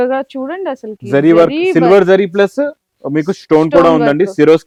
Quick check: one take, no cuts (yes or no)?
yes